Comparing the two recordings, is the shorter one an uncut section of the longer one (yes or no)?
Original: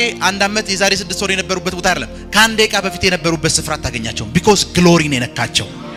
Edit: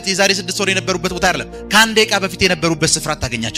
yes